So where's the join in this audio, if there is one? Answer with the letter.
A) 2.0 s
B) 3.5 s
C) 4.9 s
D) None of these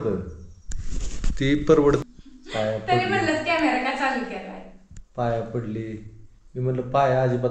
A